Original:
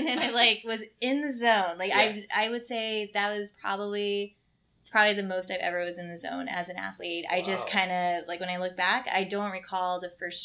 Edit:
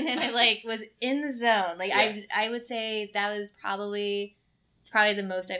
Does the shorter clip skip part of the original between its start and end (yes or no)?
no